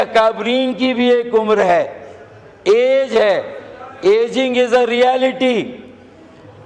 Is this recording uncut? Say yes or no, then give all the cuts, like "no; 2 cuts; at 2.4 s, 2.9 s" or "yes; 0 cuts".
yes; 0 cuts